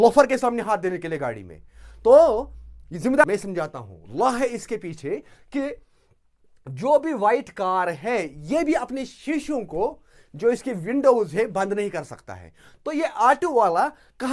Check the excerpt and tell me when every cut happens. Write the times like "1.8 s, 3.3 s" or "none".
3.2 s